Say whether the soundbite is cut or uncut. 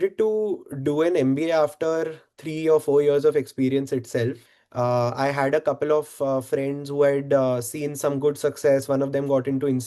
cut